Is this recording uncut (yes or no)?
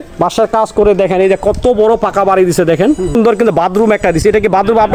no